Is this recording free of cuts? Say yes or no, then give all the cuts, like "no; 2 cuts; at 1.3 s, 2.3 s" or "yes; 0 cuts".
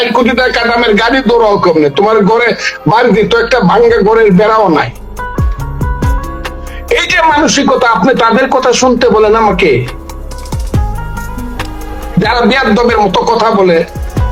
yes; 0 cuts